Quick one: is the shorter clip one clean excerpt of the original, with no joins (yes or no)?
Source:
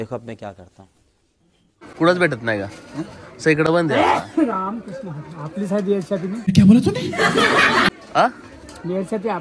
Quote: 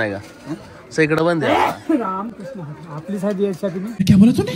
yes